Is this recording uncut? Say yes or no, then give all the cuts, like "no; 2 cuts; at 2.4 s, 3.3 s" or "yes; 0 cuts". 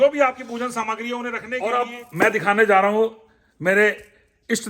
no; 1 cut; at 1.6 s